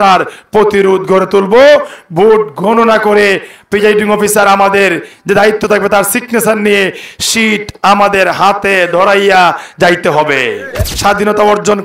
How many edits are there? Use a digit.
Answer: 1